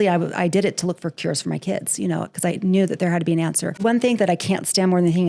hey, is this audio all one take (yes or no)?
no